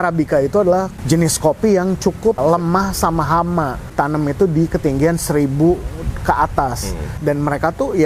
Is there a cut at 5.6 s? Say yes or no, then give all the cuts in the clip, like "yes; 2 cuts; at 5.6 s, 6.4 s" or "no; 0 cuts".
no; 4 cuts; at 1.0 s, 2.4 s, 3.9 s, 7.2 s